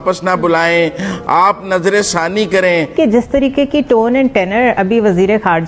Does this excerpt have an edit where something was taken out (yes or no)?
yes